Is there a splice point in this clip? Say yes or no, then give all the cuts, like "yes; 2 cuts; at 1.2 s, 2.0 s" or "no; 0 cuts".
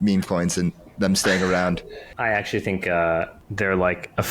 yes; 2 cuts; at 2.0 s, 3.4 s